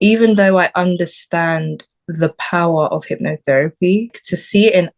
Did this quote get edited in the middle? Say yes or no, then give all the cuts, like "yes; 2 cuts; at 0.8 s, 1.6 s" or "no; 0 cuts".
no; 0 cuts